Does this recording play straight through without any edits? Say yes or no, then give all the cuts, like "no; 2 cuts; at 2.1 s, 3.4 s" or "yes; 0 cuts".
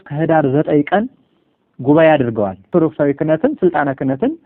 no; 1 cut; at 2.7 s